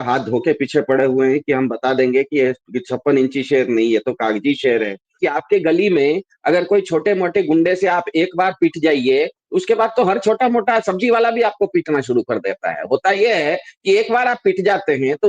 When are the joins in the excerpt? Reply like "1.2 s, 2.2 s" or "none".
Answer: 5.2 s